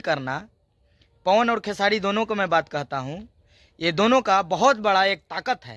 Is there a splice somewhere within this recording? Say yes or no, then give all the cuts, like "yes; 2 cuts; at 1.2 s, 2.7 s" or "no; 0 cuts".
no; 0 cuts